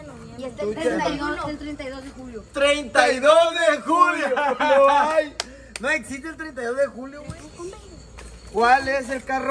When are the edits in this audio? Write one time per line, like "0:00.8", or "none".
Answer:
0:07.2